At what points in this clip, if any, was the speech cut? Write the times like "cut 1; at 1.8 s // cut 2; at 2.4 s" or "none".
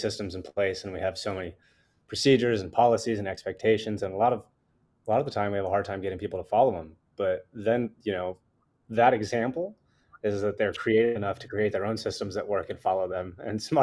none